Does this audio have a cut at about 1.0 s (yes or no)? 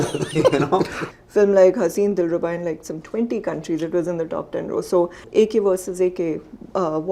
yes